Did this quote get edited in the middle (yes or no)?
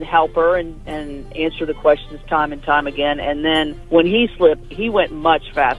yes